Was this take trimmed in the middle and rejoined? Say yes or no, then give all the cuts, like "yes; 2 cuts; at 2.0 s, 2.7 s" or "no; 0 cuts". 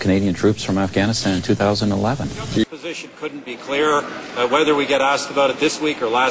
yes; 1 cut; at 2.8 s